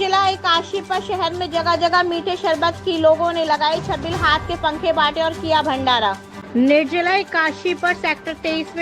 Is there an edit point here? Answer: yes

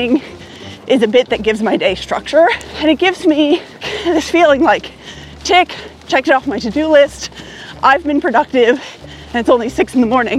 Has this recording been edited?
yes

